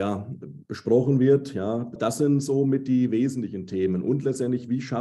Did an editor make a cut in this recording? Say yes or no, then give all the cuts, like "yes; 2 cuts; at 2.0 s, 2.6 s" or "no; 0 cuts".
yes; 1 cut; at 1.9 s